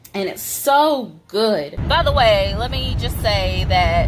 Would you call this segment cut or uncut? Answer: cut